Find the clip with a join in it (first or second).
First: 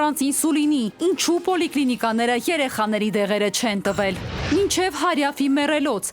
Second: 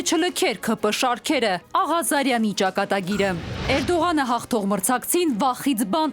first